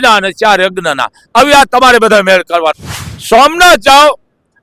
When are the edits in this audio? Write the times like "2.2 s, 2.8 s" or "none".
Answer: 2.8 s